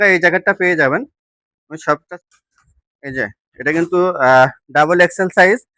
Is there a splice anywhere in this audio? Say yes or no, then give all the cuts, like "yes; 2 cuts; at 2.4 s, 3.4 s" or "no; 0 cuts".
yes; 1 cut; at 2.1 s